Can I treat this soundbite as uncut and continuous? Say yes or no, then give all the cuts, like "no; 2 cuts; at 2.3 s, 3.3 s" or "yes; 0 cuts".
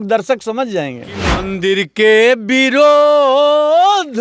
no; 1 cut; at 1.5 s